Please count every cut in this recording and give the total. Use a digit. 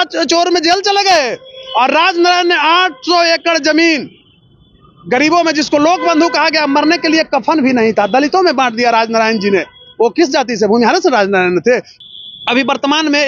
1